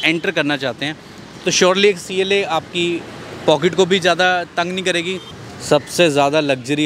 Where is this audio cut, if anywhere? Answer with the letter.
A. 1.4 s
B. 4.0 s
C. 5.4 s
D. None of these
C